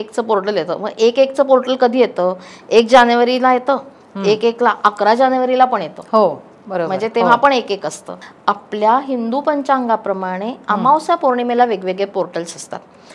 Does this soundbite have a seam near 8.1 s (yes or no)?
yes